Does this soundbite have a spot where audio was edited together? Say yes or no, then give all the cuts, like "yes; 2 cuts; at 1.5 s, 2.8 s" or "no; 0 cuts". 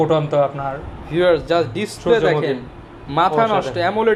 no; 0 cuts